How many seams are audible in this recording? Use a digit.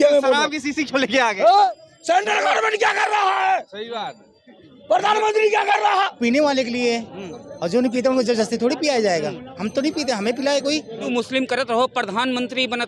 3